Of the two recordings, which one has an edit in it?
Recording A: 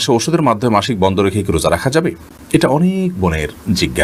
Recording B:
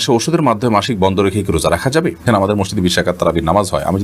B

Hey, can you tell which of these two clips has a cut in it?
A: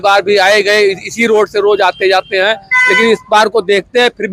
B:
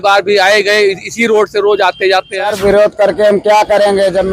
B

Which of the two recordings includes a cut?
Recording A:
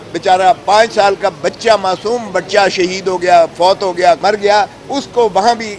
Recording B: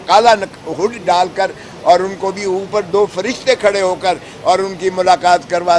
A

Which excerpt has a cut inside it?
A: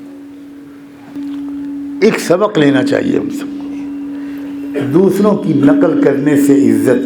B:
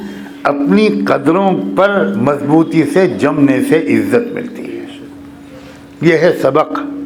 A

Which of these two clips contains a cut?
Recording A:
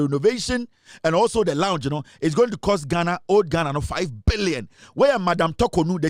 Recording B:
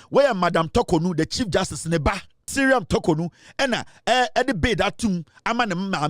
B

